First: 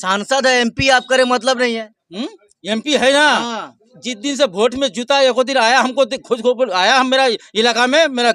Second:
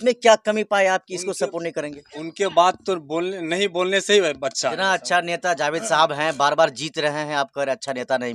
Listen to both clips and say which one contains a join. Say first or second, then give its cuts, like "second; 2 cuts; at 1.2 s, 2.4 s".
second; 1 cut; at 4.7 s